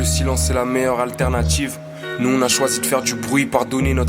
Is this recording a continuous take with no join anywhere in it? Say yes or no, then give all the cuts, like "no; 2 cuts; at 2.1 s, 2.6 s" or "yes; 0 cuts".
yes; 0 cuts